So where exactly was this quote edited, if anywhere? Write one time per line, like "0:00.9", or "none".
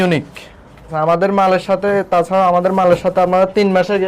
0:00.9